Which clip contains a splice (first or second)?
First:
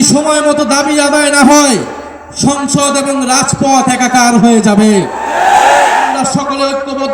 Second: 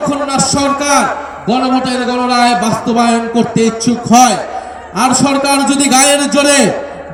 first